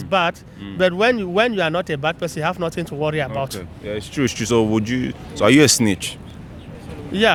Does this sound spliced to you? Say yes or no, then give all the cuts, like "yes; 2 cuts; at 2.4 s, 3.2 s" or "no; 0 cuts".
no; 0 cuts